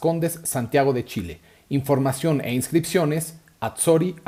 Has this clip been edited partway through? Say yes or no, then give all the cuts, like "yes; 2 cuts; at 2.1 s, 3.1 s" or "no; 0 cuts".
no; 0 cuts